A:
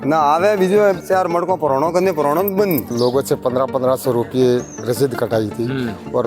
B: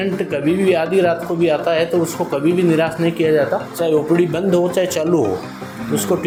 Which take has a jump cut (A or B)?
A